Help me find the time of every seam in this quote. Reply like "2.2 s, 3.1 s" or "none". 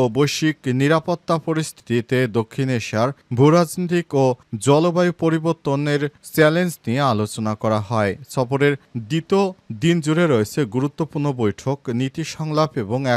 none